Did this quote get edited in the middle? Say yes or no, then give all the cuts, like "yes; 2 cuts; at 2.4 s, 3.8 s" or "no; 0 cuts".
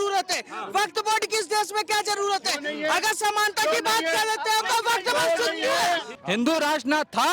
yes; 1 cut; at 6.1 s